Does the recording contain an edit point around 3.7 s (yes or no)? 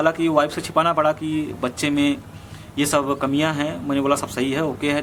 no